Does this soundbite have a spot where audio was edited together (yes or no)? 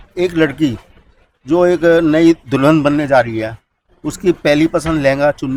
no